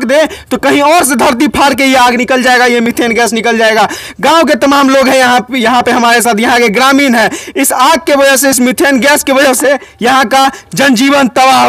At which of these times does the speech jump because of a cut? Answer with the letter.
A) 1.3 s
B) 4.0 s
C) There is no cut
C